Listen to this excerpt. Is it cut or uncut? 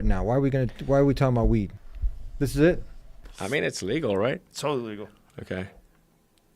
cut